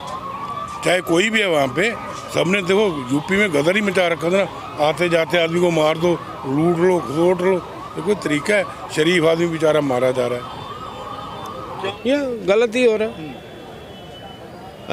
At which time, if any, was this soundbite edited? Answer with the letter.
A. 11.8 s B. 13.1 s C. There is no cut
A